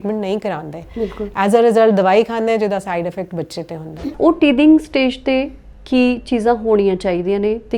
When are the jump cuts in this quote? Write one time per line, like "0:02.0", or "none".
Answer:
0:04.1